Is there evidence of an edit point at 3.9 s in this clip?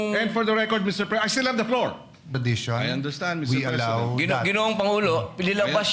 no; 1 cut; at 2.3 s

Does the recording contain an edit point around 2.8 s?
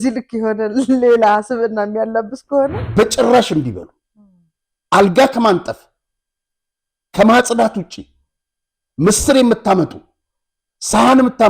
yes; 1 cut; at 2.8 s

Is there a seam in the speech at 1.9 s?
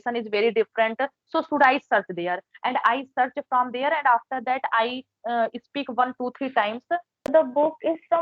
no; 1 cut; at 7.3 s

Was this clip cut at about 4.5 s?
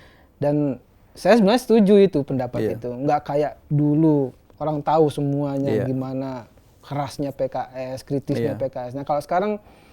yes; 1 cut; at 4.5 s

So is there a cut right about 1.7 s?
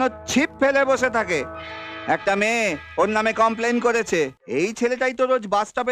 no; 1 cut; at 4.4 s

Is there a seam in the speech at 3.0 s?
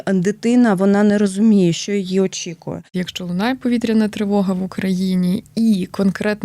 yes; 1 cut; at 3.0 s

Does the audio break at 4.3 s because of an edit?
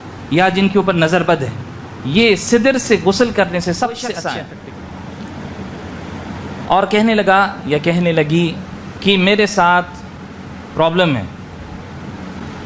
yes; 1 cut; at 4.3 s

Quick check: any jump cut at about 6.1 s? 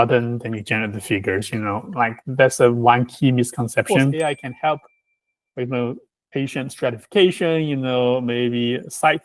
yes; 2 cuts; at 4.1 s, 6.1 s

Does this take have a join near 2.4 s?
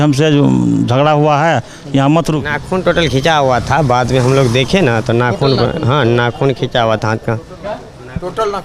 yes; 1 cut; at 2.4 s

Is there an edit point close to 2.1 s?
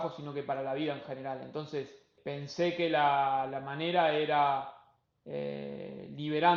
yes; 1 cut; at 2.1 s

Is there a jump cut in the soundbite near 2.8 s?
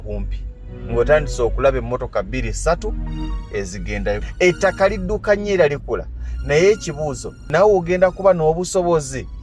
no; 2 cuts; at 4.3 s, 7.3 s

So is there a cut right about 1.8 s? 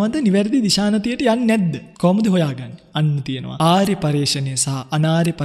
yes; 2 cuts; at 1.8 s, 3.4 s

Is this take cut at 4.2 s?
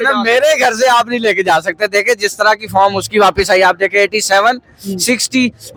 no; 0 cuts

